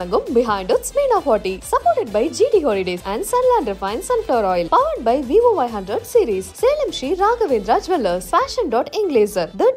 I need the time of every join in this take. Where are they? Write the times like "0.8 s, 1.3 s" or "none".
none